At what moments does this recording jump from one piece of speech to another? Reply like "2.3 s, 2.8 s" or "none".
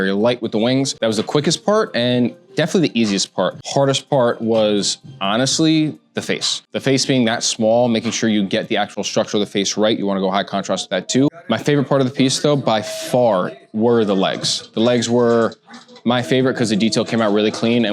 0.9 s, 3.6 s